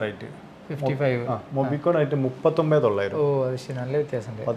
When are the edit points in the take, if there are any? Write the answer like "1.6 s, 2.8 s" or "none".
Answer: none